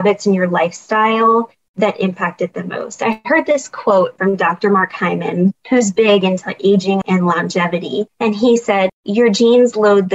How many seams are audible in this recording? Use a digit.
5